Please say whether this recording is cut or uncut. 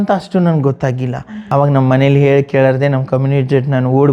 cut